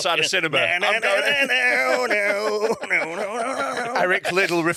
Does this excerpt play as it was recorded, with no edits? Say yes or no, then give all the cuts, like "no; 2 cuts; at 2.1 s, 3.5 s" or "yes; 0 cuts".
yes; 0 cuts